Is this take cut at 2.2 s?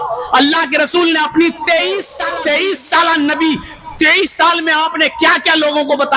yes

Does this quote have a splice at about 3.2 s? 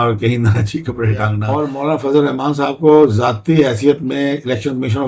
no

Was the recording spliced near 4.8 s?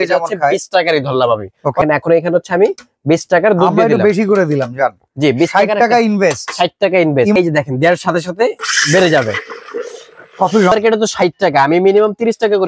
no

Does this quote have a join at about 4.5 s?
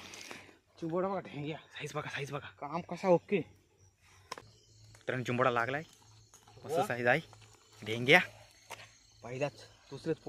yes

